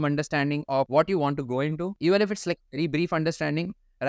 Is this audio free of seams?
no; 2 cuts; at 0.9 s, 1.9 s

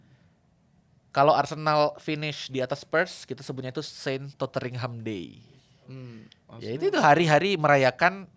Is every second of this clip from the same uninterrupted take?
yes; 0 cuts

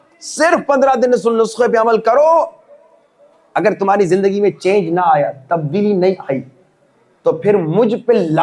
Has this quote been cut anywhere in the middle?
no; 0 cuts

